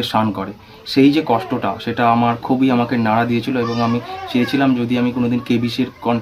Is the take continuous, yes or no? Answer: yes